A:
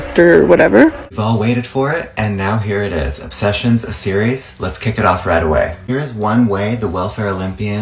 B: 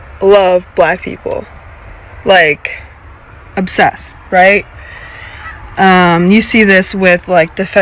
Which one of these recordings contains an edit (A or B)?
A